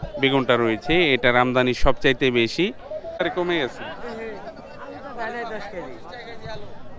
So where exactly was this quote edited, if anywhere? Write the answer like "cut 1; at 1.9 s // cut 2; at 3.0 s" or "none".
cut 1; at 3.2 s